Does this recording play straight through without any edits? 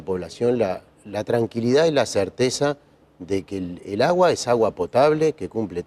yes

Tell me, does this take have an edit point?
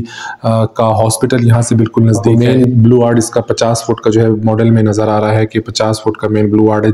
yes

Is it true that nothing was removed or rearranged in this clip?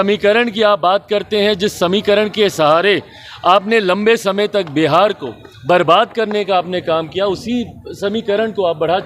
yes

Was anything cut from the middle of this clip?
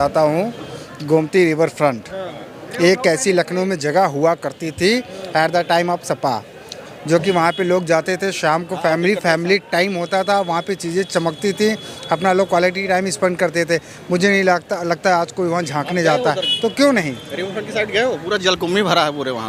no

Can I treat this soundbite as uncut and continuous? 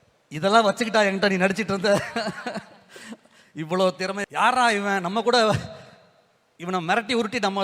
no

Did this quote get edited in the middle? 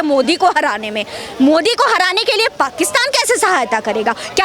no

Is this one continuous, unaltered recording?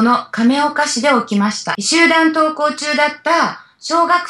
no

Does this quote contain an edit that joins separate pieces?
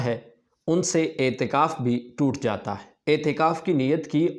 yes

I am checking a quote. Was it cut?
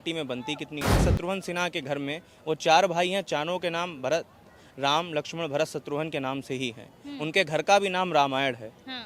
yes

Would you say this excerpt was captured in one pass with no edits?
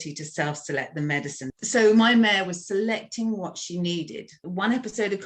no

